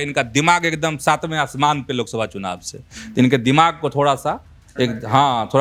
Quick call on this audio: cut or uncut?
uncut